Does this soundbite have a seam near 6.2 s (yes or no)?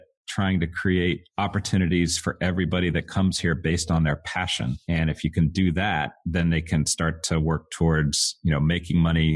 yes